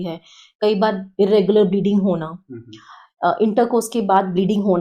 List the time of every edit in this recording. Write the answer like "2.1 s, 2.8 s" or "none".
none